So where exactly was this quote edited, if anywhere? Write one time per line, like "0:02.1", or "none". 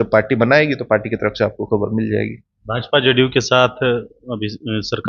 none